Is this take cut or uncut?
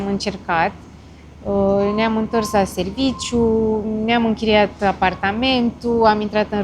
uncut